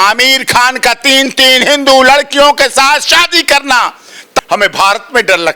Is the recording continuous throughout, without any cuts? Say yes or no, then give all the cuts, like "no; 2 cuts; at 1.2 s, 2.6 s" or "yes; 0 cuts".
no; 1 cut; at 4.4 s